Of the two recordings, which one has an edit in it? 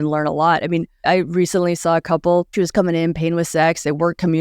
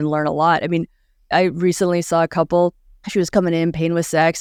first; 2 cuts; at 0.9 s, 2.5 s

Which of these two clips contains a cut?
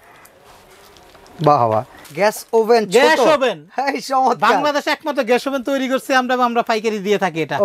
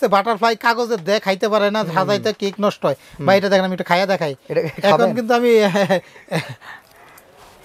first; 1 cut; at 2.0 s

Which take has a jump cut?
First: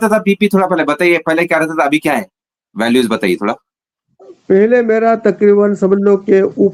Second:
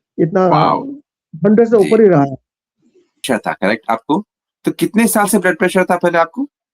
second; 1 cut; at 3.1 s

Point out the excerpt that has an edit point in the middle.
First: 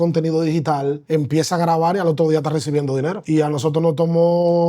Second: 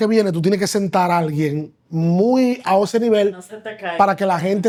first; 2 cuts; at 1.0 s, 3.2 s

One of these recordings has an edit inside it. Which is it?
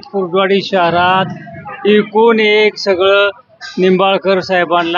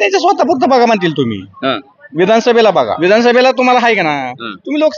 second; 1 cut; at 2.9 s

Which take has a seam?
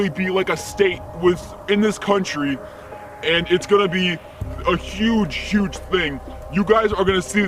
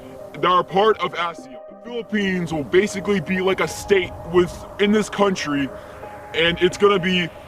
second; 1 cut; at 2.1 s

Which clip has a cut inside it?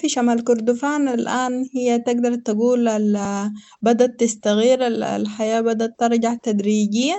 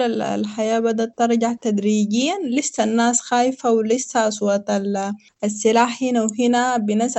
second; 1 cut; at 5.2 s

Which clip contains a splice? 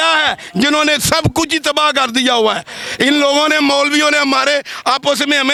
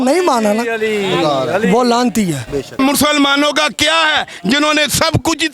second; 1 cut; at 2.8 s

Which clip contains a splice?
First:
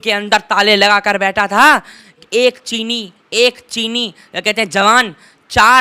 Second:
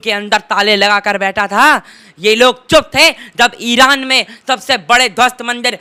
first; 1 cut; at 2.2 s

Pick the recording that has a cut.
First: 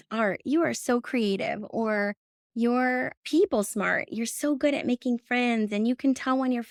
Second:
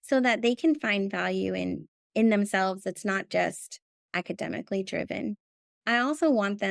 second; 1 cut; at 5.8 s

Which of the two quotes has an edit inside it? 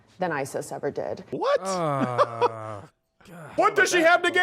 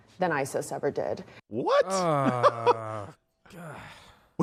first; 2 cuts; at 1.2 s, 3.5 s

